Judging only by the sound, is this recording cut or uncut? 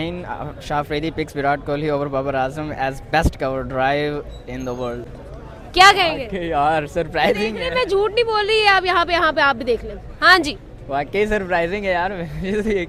uncut